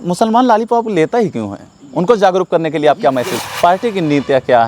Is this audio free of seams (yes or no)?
no